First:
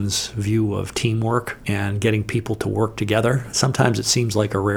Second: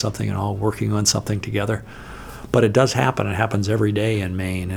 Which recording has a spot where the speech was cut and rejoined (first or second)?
first